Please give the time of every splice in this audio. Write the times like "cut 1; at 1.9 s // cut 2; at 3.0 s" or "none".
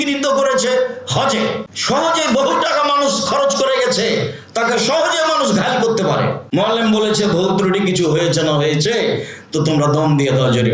cut 1; at 1.7 s // cut 2; at 6.4 s